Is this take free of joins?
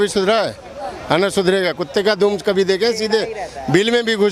yes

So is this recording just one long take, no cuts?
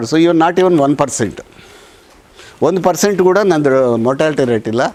yes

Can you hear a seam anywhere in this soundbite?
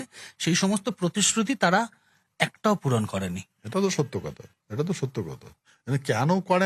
no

